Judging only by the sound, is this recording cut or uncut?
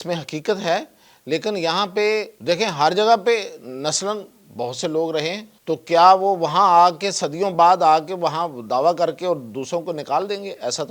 cut